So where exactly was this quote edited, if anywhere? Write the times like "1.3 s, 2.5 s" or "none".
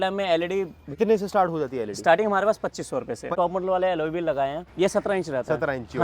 1.0 s, 3.3 s, 4.6 s